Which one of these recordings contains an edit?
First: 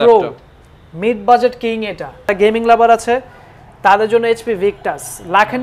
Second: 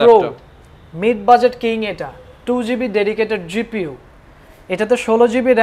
first; 1 cut; at 2.3 s

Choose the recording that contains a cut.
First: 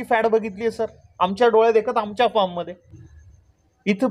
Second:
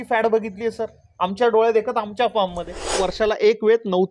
second; 1 cut; at 3.0 s

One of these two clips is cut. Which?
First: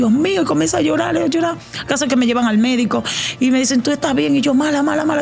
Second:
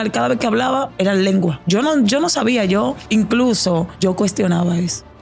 second; 4 cuts; at 0.9 s, 1.6 s, 3.0 s, 3.9 s

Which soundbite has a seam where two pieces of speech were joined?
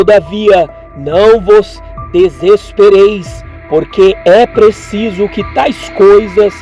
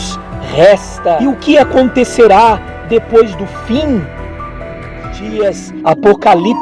second; 1 cut; at 5.2 s

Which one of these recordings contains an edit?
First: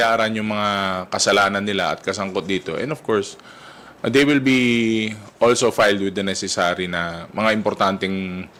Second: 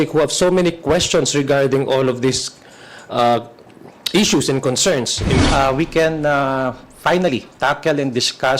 second; 1 cut; at 5.3 s

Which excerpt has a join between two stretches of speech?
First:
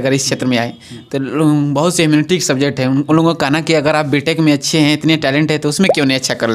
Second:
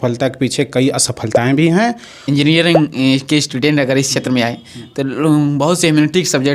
second; 1 cut; at 2.2 s

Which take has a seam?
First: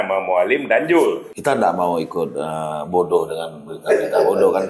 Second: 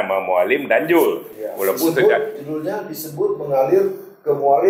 first; 1 cut; at 1.3 s

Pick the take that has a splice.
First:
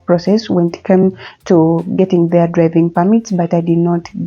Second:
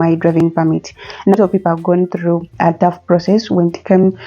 second; 1 cut; at 1.3 s

